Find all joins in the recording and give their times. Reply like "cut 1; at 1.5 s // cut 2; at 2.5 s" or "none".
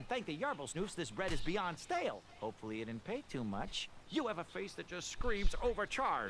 cut 1; at 5.1 s